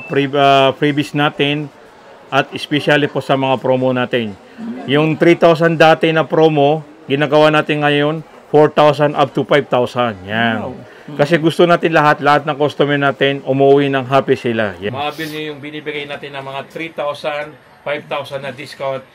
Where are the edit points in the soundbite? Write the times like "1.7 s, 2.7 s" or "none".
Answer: 14.9 s